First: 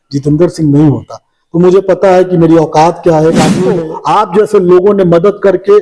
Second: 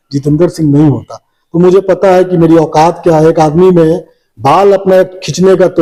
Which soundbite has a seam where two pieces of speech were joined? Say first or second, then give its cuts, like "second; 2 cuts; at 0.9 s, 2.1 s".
first; 1 cut; at 3.7 s